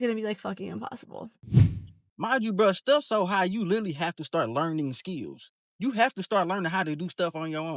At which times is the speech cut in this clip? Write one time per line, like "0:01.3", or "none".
none